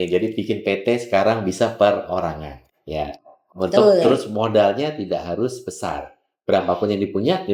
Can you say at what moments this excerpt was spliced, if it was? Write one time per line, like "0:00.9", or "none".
none